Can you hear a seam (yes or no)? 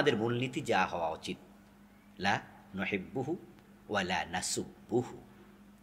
no